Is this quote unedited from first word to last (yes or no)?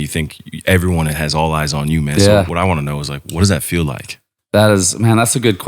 no